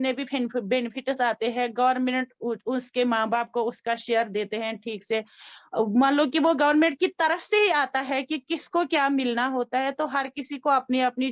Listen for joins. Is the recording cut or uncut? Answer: uncut